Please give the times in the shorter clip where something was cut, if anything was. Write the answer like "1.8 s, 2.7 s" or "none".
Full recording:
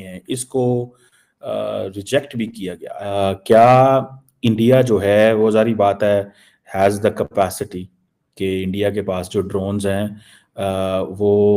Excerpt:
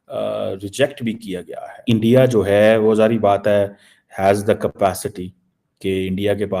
1.6 s